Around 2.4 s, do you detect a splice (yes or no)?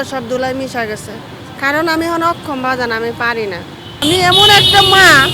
no